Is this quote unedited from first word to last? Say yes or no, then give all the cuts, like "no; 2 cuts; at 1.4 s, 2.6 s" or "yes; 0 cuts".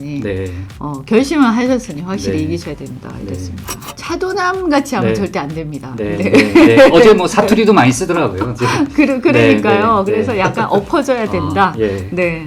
no; 1 cut; at 3.9 s